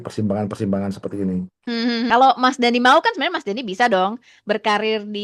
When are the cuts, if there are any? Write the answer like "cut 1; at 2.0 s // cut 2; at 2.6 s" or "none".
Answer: cut 1; at 2.1 s